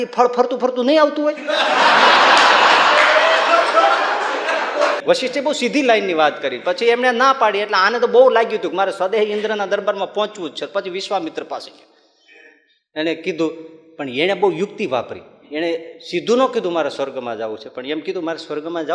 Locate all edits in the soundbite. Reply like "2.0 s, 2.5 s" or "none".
5.0 s